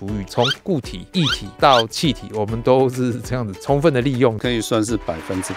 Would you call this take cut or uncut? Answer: uncut